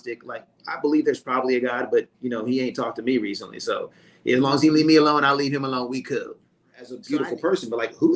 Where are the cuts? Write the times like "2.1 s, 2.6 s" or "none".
7.0 s